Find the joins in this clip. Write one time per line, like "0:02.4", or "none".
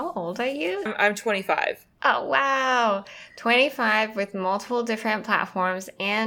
0:00.9